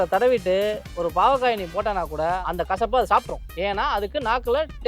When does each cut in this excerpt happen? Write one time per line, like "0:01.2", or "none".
0:02.4
0:03.4

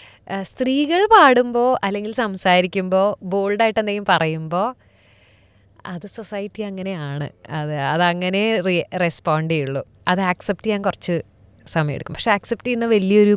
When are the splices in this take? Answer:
none

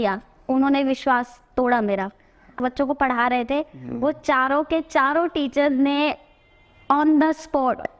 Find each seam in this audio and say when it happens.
0:02.6

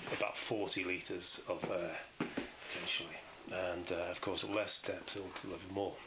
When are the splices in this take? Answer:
0:03.6

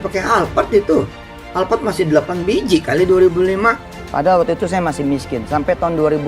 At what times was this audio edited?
0:04.0

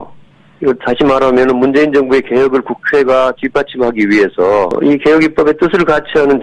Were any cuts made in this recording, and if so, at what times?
0:04.7

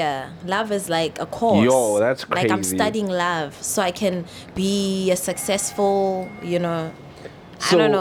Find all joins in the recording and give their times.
none

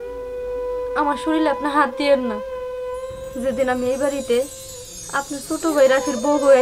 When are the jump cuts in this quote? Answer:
0:02.3
0:03.4

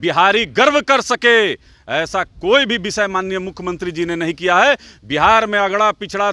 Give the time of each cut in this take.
none

